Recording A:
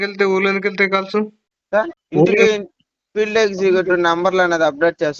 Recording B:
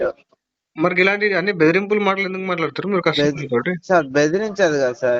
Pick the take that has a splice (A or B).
A